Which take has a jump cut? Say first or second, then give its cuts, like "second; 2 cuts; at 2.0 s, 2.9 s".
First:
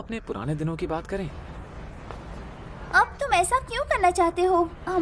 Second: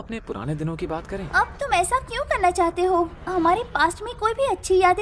second; 1 cut; at 1.3 s